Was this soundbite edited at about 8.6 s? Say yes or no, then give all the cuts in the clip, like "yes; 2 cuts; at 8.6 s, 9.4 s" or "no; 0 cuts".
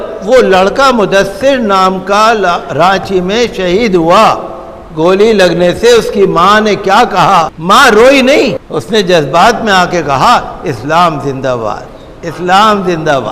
yes; 2 cuts; at 7.5 s, 8.6 s